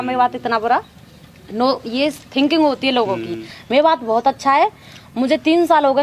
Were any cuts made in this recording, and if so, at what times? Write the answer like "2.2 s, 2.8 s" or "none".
none